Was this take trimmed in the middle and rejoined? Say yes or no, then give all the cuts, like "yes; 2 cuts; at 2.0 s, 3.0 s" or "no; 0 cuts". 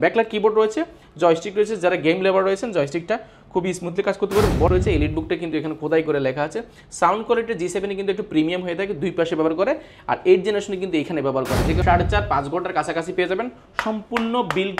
yes; 2 cuts; at 4.7 s, 11.8 s